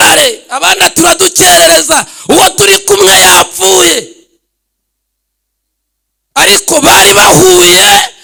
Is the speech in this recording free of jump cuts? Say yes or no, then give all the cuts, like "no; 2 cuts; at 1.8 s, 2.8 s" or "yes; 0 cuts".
yes; 0 cuts